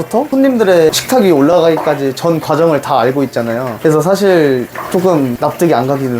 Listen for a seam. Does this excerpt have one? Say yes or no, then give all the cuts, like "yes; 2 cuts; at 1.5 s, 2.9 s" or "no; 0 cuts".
yes; 3 cuts; at 1.0 s, 3.7 s, 5.3 s